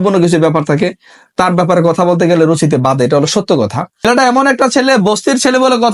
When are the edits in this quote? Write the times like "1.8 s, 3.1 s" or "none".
4.0 s